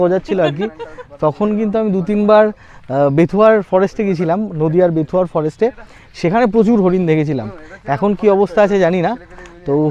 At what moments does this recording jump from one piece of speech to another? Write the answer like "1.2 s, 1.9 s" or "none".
none

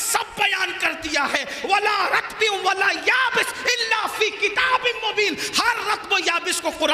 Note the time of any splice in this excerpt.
none

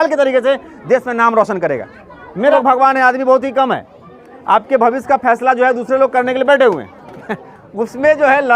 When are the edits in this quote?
2.5 s

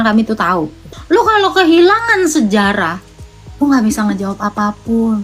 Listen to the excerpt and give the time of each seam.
0.9 s

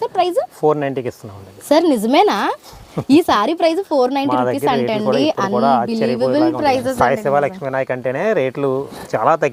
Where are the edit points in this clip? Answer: none

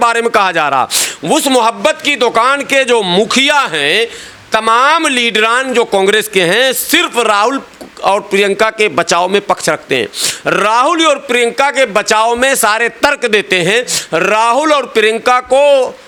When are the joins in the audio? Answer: none

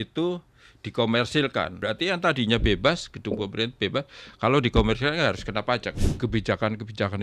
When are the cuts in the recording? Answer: 1.7 s, 6.0 s

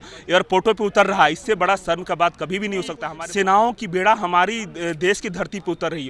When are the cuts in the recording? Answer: 3.1 s

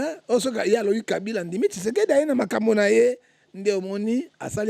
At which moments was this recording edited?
none

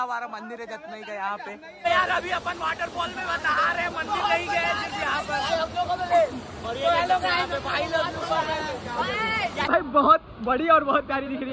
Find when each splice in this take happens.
1.9 s, 9.7 s

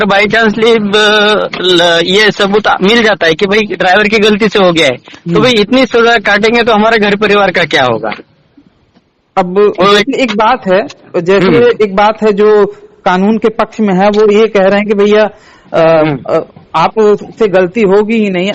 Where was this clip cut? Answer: none

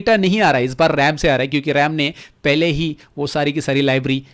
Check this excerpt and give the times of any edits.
none

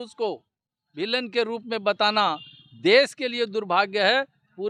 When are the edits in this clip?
none

